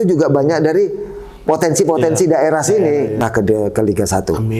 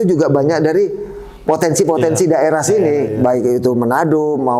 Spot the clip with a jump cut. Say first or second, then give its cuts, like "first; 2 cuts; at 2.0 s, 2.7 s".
first; 1 cut; at 3.2 s